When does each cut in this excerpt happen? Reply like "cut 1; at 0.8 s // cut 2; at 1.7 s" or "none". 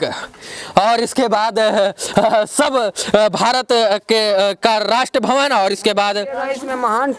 none